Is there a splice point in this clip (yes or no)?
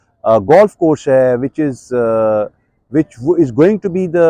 no